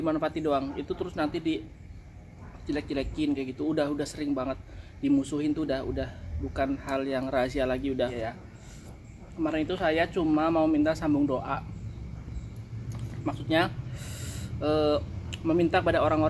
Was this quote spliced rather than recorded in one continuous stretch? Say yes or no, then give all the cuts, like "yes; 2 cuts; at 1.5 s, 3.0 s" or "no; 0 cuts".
yes; 1 cut; at 8.1 s